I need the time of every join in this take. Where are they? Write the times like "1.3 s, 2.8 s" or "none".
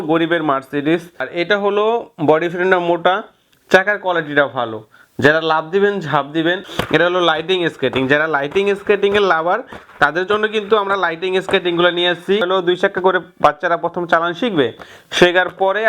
1.2 s, 6.7 s, 12.4 s